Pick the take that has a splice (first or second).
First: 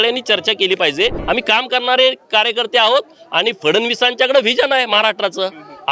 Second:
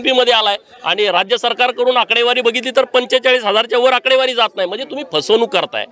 first